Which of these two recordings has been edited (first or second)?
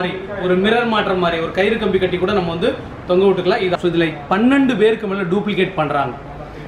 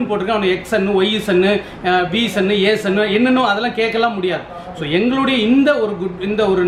first